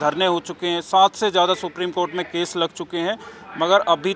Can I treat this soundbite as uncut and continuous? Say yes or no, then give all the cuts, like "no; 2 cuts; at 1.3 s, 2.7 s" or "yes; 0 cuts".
yes; 0 cuts